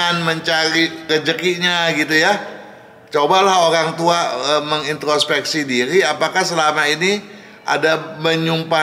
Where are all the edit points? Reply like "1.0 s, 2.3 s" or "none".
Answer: none